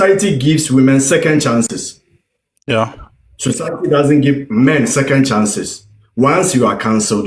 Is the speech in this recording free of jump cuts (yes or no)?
yes